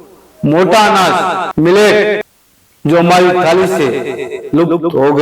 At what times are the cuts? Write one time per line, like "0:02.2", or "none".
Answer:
0:01.4
0:02.2